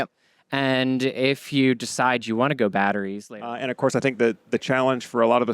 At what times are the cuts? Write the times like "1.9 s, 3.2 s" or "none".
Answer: 3.2 s

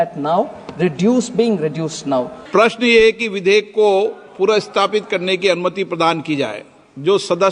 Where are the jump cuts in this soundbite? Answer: 2.4 s

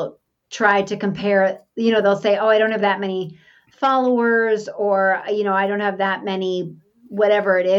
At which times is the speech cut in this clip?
none

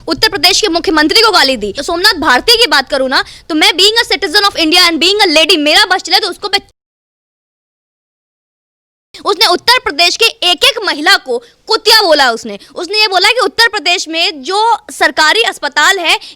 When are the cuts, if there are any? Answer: 1.8 s

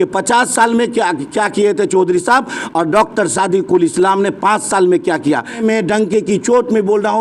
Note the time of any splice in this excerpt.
5.6 s

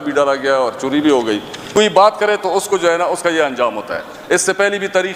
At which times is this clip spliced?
1.5 s

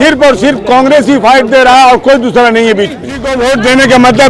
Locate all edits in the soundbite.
3.3 s

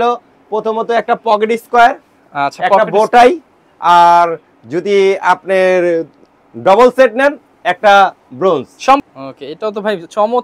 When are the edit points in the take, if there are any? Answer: 9.0 s

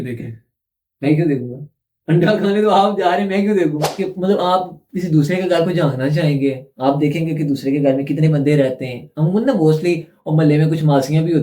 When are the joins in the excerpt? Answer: 3.9 s

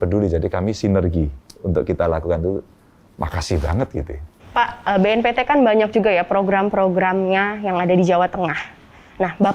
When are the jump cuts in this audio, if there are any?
4.4 s

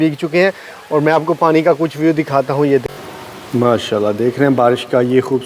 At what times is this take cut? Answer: 2.8 s

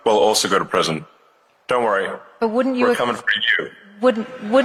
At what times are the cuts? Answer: none

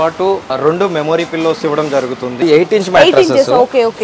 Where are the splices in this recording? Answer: 2.4 s

